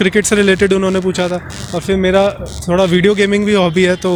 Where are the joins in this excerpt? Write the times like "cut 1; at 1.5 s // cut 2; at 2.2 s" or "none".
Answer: none